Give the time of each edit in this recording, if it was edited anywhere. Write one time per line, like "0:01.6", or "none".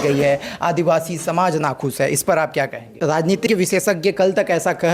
0:02.8